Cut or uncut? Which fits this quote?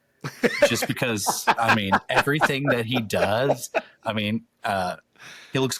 uncut